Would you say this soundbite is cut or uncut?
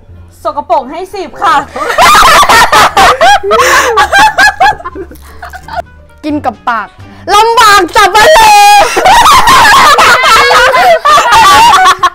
uncut